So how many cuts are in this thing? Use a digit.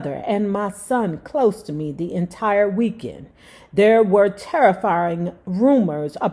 0